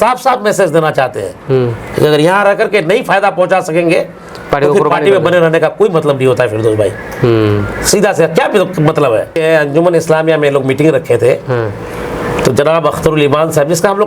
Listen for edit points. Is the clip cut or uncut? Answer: cut